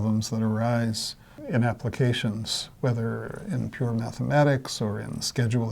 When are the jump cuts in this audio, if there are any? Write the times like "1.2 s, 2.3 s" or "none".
1.4 s